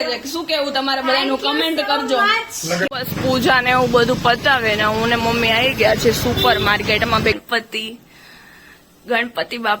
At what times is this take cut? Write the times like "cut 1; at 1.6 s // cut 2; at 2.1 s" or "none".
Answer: cut 1; at 2.9 s // cut 2; at 7.4 s